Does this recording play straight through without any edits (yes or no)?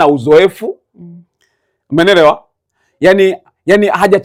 yes